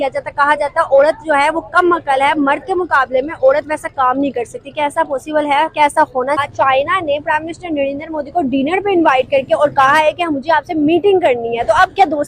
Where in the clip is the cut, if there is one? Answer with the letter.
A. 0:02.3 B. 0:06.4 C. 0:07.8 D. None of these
B